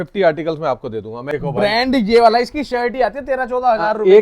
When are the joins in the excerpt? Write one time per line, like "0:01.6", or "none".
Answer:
0:01.4